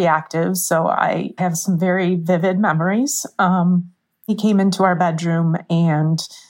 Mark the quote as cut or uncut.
cut